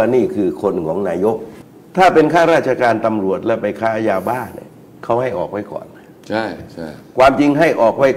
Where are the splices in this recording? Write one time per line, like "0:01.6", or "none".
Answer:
0:01.6